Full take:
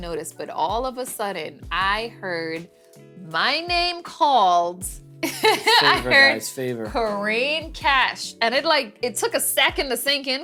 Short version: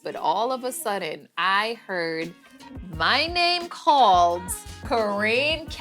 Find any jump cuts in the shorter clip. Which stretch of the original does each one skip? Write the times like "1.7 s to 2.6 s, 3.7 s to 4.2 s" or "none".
5.1 s to 6.8 s